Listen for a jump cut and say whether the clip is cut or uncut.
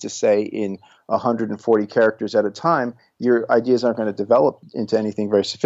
cut